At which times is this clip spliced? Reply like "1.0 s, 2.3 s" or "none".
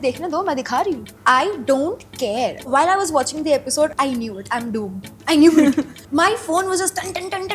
1.1 s, 2.7 s, 3.9 s, 6.0 s